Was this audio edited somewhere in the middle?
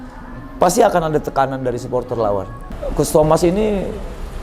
yes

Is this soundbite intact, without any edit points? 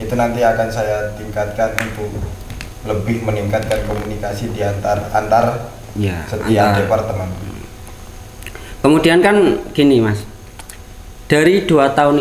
yes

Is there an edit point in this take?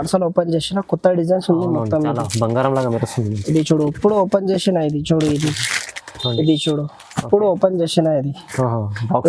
no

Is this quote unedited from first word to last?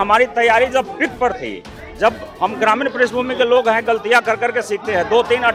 yes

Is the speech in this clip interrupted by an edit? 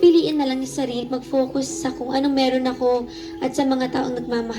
no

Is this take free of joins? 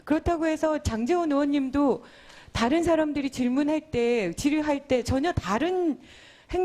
no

